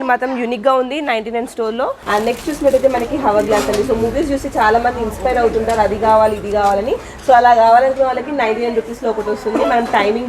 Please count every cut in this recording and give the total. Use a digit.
1